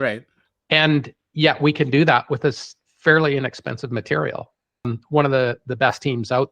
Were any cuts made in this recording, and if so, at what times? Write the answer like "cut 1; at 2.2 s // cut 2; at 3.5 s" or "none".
cut 1; at 4.9 s

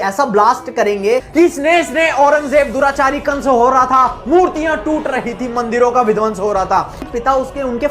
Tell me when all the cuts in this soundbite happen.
cut 1; at 1.3 s // cut 2; at 7.0 s

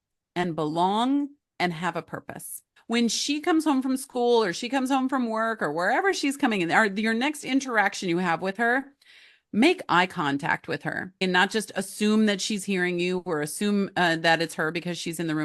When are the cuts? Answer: cut 1; at 2.8 s // cut 2; at 11.2 s

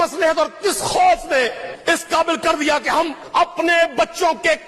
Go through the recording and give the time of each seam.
cut 1; at 1.7 s // cut 2; at 3.2 s

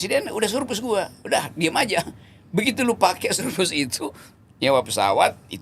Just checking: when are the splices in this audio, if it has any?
none

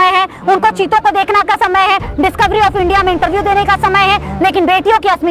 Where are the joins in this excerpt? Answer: none

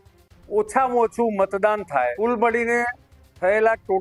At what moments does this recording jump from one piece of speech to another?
cut 1; at 2.2 s

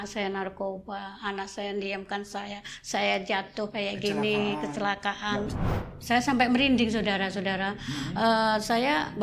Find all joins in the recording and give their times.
cut 1; at 5.6 s

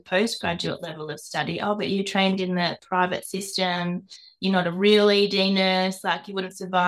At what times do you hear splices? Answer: none

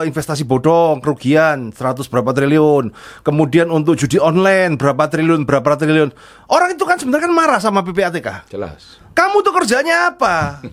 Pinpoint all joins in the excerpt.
none

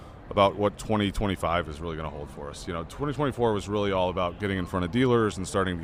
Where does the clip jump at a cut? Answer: none

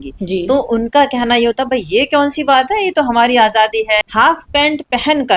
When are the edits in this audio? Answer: cut 1; at 4.0 s

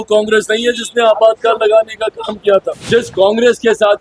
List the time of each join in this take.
cut 1; at 2.8 s

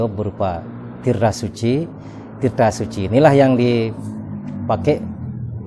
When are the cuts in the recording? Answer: none

